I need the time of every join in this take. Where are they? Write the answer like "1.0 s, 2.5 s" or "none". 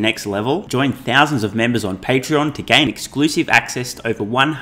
none